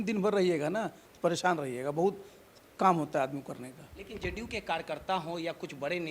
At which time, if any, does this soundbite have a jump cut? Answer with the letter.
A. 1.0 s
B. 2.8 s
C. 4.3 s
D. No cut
D